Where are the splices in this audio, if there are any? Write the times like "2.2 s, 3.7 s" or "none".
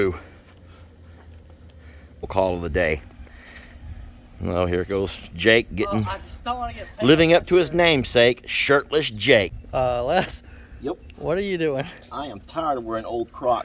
2.3 s, 9.5 s

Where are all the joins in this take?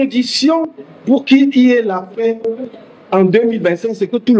none

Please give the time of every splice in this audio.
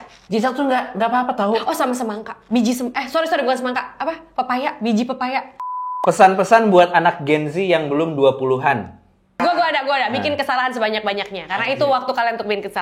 5.6 s

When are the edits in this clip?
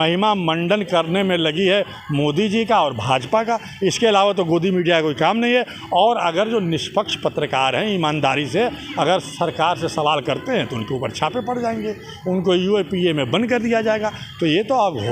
none

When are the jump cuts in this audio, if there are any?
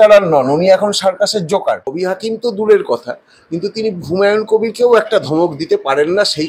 1.9 s

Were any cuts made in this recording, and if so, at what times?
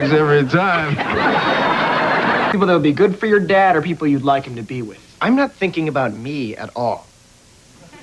2.5 s

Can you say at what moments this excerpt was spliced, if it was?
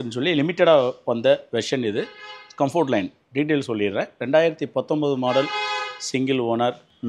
none

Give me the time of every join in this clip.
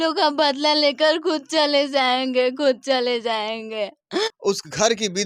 none

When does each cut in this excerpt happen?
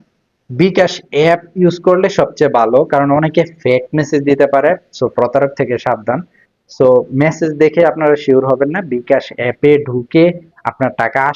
none

